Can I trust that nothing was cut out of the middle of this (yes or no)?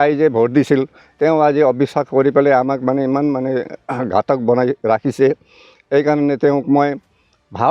yes